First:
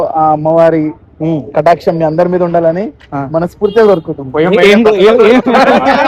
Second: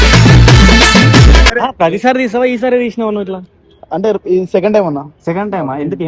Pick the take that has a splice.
second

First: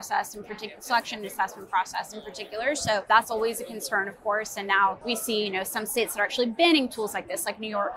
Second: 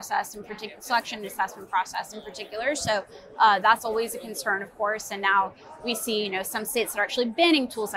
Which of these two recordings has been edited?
first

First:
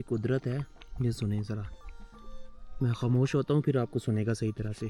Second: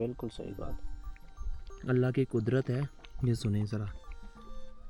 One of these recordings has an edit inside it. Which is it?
second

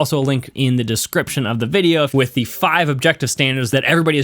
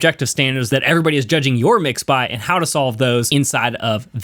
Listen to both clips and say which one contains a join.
first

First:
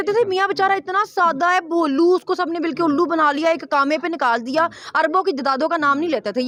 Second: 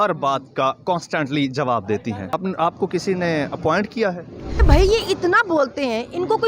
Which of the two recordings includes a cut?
second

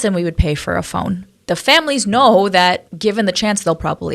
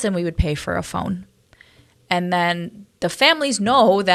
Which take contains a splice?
first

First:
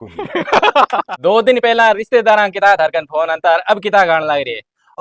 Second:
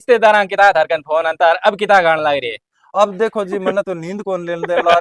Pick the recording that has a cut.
first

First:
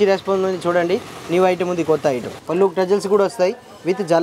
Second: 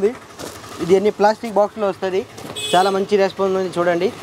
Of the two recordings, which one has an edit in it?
first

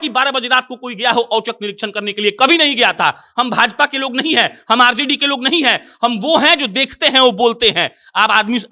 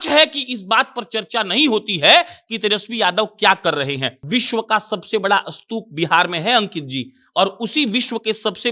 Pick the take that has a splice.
second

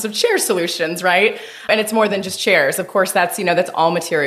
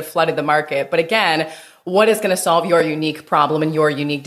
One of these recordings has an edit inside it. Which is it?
first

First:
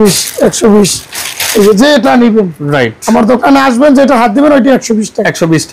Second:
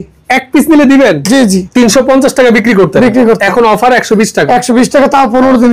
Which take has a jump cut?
second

